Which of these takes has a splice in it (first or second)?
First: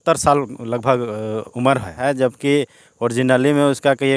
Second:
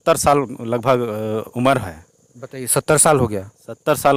first